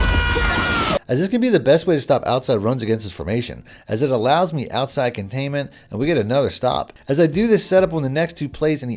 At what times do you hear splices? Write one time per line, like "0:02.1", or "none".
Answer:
0:01.0